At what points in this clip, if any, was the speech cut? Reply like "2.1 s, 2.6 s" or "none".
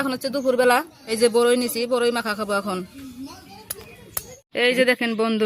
1.0 s, 4.6 s